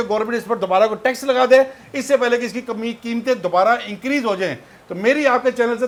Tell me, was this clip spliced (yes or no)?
no